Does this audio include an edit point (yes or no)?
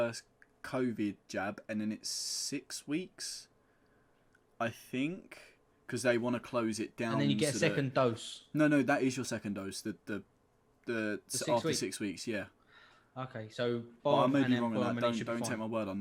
no